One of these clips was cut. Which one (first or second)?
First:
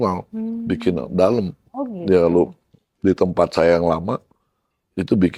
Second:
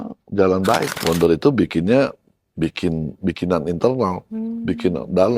second